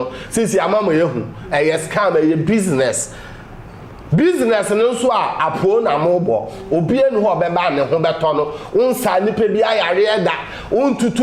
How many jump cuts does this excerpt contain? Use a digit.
0